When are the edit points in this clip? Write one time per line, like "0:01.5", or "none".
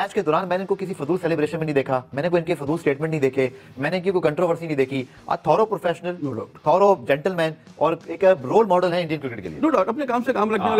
none